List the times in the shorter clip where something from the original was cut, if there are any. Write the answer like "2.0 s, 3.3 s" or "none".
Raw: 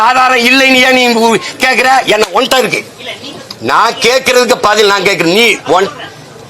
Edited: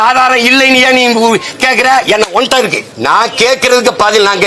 2.9 s